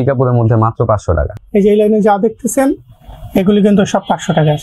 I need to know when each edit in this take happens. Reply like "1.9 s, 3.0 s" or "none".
1.4 s